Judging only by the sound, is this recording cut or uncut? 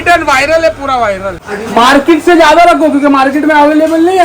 cut